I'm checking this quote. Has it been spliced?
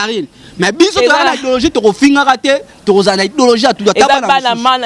no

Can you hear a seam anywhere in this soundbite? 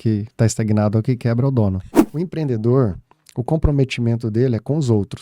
yes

